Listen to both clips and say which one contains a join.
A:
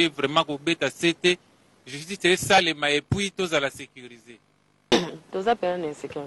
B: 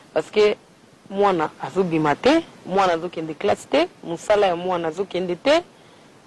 A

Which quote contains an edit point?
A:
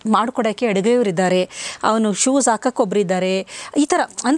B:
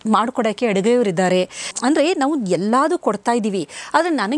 B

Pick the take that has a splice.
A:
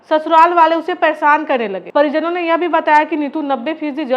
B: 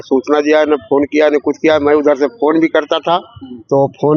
A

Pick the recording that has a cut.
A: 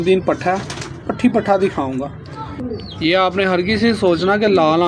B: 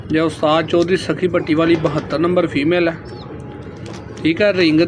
A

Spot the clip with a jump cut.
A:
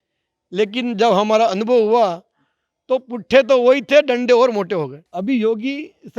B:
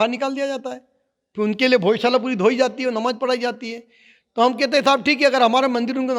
A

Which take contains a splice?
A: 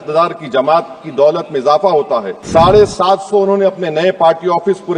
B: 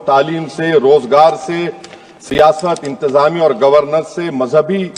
A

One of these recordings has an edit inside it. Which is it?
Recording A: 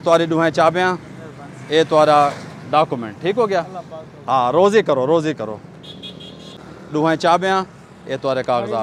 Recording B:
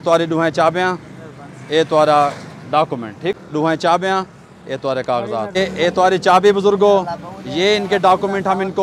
B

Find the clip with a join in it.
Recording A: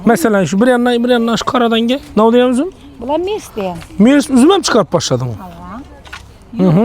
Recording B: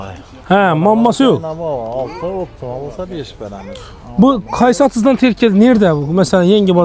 A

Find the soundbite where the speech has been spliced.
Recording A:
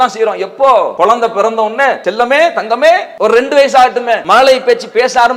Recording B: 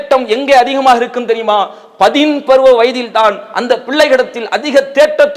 A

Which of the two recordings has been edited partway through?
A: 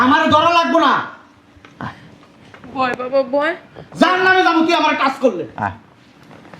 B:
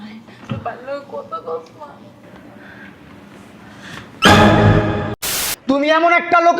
B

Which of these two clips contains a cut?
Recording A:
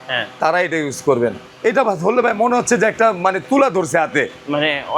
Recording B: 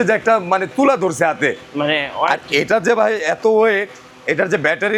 A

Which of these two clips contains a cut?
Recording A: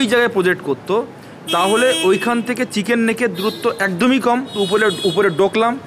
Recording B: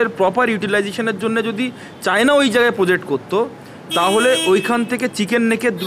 A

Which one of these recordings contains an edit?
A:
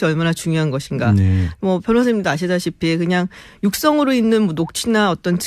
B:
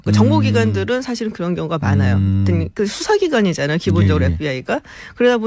B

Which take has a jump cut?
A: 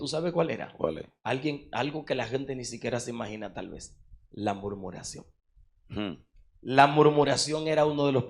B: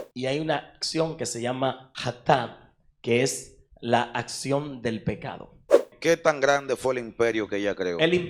B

